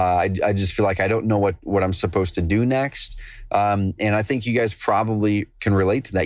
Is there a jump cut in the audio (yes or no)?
no